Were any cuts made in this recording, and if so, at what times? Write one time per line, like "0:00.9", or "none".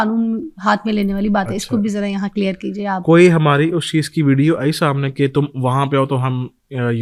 none

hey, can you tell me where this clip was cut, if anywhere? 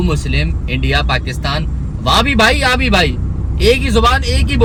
none

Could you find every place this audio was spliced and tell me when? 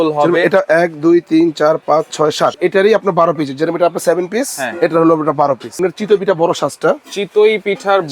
0:02.5
0:05.8

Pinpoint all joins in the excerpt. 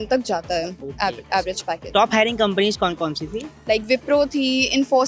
0:01.9

